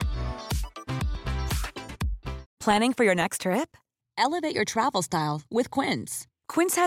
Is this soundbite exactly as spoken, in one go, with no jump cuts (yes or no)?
yes